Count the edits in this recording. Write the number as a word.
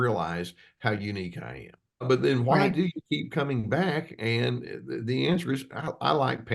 one